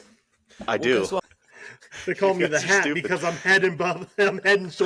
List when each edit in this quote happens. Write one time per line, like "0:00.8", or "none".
0:01.2

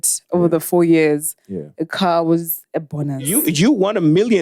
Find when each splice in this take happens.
0:03.4

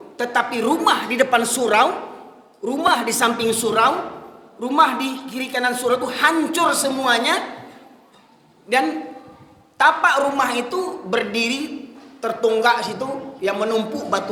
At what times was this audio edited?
none

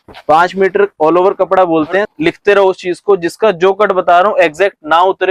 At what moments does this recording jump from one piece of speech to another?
0:02.1

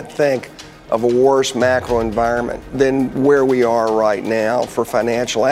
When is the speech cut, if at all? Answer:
0:02.7

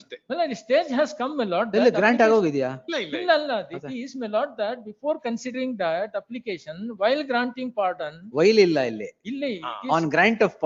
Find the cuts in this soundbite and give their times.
none

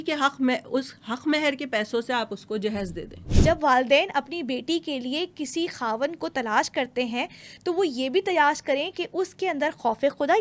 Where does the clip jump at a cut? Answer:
0:03.2

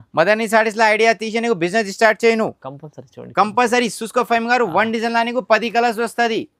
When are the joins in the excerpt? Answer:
none

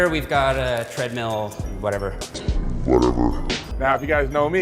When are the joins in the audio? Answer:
0:02.5

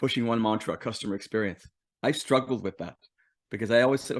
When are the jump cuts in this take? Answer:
none

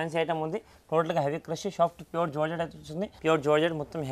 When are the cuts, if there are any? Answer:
0:03.1

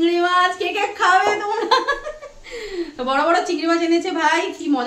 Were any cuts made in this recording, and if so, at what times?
none

